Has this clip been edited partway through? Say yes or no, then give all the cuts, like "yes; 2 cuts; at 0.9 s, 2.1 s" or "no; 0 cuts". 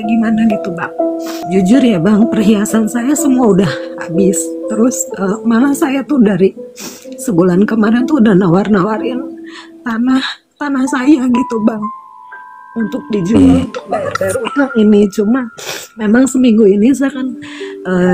yes; 1 cut; at 1.3 s